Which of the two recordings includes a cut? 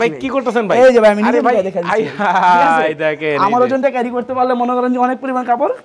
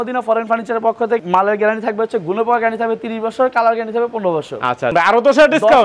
second; 2 cuts; at 1.3 s, 4.9 s

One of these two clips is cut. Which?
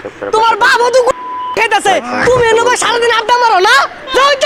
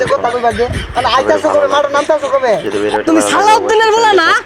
second; 1 cut; at 2.8 s

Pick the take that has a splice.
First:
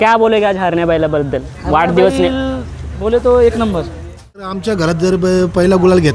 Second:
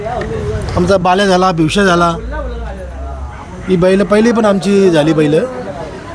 first; 1 cut; at 4.6 s

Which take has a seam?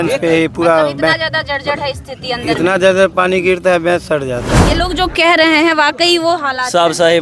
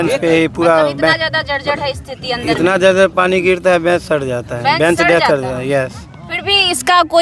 first; 1 cut; at 4.6 s

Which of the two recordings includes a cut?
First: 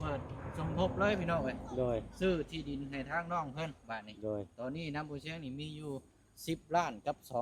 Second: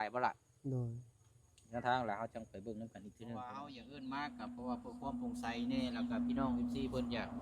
second; 1 cut; at 3.4 s

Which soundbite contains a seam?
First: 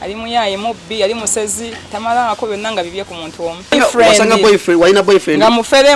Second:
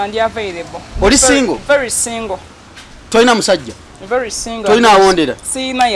first; 1 cut; at 3.7 s

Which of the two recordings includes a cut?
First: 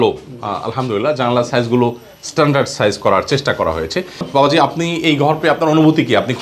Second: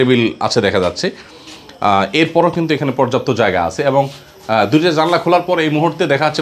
first; 1 cut; at 4.2 s

